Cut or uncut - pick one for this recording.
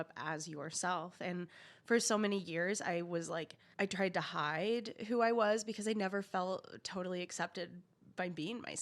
cut